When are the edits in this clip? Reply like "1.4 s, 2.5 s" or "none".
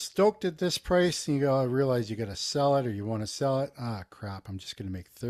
none

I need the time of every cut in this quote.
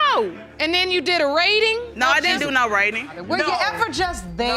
1.9 s, 3.2 s

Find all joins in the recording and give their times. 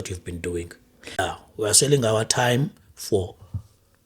1.2 s

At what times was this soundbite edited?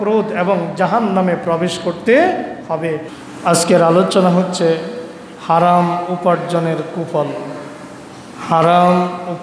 3.1 s

